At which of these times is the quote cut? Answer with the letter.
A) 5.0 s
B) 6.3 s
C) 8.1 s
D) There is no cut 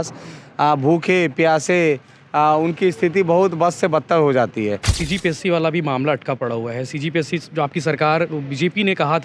A